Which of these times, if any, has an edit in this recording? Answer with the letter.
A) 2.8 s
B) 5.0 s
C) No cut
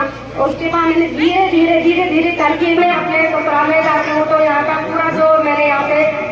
A